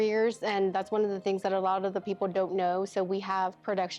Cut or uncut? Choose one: uncut